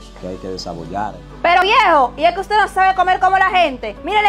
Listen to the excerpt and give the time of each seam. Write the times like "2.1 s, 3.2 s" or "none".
1.6 s